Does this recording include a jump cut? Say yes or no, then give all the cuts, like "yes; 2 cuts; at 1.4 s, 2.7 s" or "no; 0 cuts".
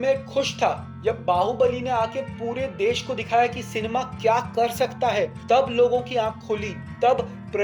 yes; 1 cut; at 5.4 s